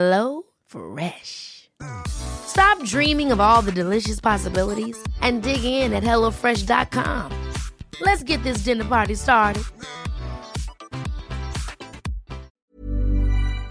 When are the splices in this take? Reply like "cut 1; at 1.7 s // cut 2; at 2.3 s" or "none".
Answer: cut 1; at 12.5 s